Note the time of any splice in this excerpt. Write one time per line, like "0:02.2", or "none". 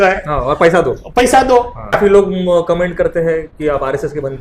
0:02.0